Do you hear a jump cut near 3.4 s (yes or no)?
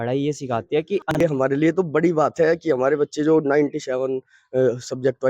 no